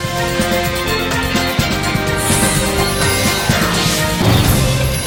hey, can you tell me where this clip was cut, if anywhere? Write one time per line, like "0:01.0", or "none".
none